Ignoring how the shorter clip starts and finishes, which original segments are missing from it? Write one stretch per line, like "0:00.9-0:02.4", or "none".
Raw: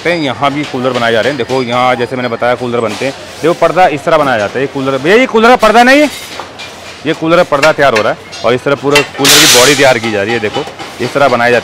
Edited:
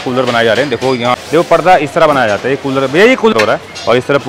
0:01.8-0:03.2
0:05.4-0:07.9

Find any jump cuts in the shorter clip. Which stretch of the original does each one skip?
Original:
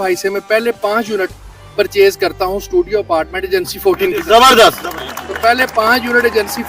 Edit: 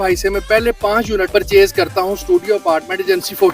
0:01.3-0:01.7

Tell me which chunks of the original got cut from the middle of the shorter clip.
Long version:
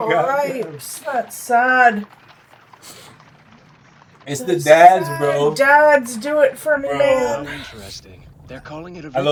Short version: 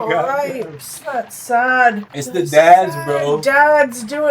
0:02.1-0:04.3

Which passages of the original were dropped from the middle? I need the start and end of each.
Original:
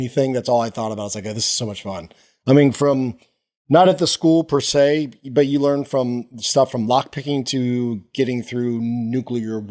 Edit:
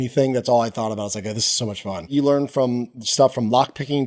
0:02.1-0:05.5

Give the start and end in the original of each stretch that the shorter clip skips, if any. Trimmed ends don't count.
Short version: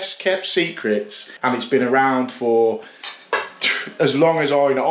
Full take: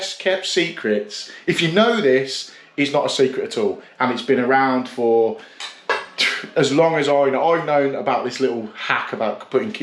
0:01.3-0:03.9

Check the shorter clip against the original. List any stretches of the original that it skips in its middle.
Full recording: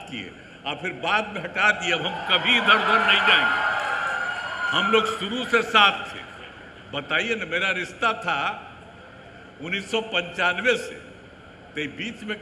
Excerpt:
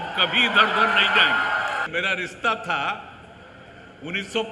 0:04.0-0:07.5

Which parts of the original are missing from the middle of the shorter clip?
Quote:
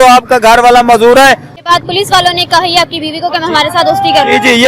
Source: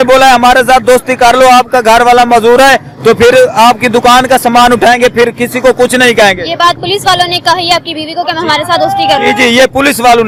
0:02.9-0:06.4

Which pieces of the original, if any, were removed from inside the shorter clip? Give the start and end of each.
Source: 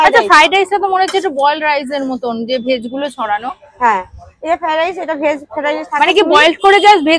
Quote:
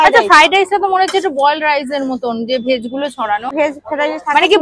0:03.5-0:05.2

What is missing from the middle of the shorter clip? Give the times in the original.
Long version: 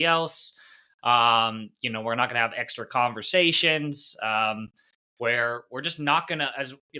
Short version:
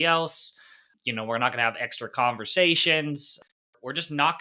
0:00.9-0:01.6
0:04.3-0:05.4

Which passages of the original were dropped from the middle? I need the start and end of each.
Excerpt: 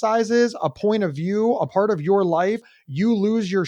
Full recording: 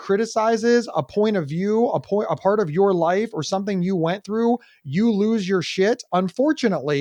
0:02.0-0:02.4
0:03.4-0:04.7

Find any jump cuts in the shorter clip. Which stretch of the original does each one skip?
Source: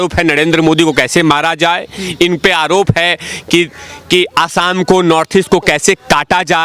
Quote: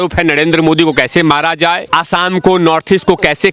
0:01.9-0:04.3

